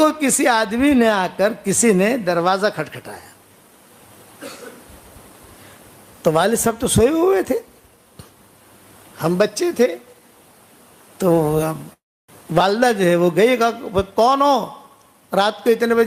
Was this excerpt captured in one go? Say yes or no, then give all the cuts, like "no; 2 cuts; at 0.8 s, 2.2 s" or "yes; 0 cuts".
yes; 0 cuts